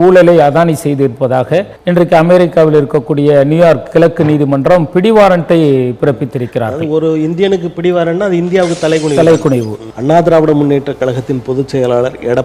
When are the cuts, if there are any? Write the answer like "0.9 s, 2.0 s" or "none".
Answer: 1.7 s, 9.8 s